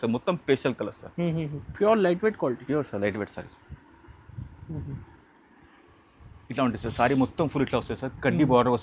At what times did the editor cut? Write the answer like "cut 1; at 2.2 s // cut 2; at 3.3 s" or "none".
cut 1; at 1.6 s